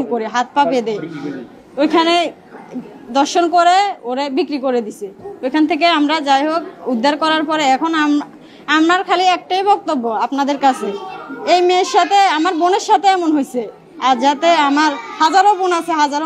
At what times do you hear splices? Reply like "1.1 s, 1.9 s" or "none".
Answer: none